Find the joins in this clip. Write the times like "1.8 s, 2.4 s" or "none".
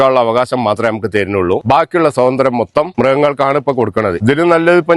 1.6 s, 2.9 s, 4.2 s